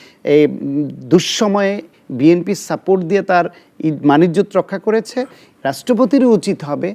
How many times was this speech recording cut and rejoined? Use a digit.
0